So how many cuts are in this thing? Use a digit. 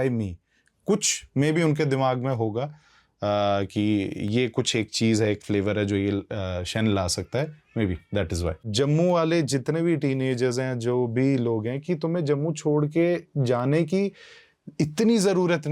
1